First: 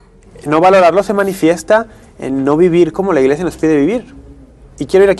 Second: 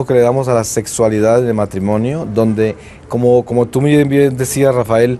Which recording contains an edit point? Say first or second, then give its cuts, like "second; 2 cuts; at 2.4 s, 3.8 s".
first; 1 cut; at 3.0 s